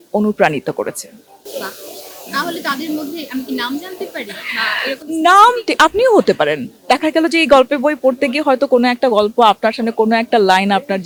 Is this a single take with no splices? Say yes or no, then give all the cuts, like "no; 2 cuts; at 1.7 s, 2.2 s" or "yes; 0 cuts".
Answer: yes; 0 cuts